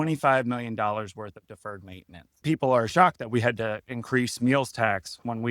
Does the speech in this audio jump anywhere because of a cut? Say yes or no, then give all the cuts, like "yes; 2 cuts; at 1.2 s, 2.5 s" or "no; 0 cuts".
yes; 1 cut; at 2.4 s